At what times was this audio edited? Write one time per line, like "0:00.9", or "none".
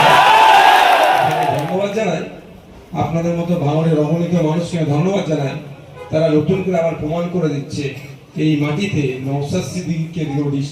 0:01.5